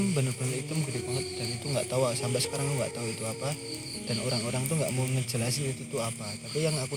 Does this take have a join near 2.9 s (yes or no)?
no